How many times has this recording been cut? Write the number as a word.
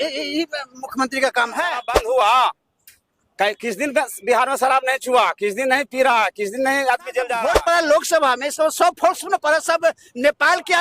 two